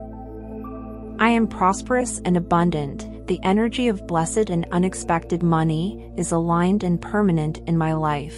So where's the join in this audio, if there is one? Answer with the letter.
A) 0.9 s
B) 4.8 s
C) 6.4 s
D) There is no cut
A